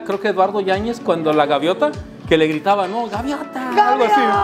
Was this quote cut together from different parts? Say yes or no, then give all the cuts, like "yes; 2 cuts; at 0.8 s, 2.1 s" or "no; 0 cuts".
no; 0 cuts